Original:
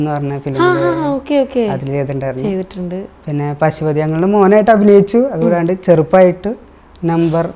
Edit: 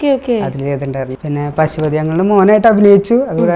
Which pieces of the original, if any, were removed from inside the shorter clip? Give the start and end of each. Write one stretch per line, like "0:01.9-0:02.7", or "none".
0:02.4-0:03.1